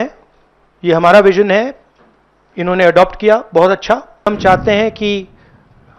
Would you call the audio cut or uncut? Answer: cut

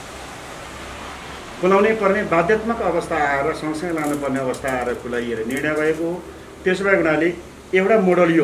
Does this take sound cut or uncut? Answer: uncut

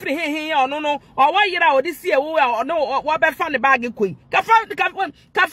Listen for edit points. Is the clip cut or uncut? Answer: uncut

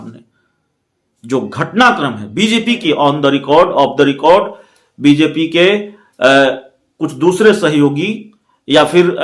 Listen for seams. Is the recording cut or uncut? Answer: cut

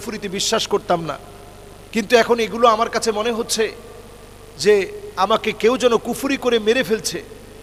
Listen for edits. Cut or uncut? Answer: uncut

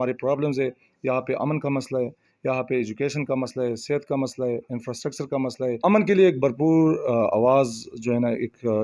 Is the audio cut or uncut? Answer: cut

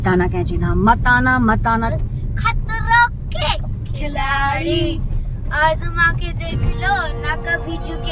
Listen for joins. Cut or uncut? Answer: cut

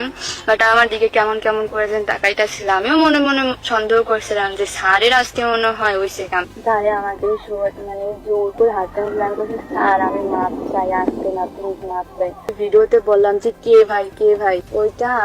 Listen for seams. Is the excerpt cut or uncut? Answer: cut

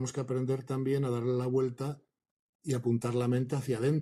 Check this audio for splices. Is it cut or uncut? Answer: uncut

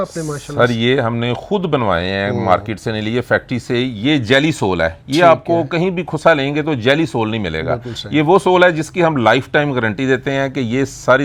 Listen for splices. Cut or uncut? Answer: uncut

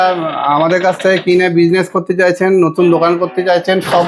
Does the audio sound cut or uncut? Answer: uncut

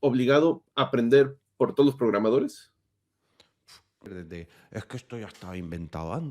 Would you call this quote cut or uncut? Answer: cut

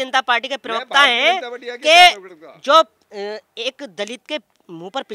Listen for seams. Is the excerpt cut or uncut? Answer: uncut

